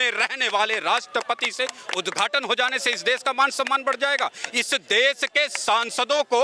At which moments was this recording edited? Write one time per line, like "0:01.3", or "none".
none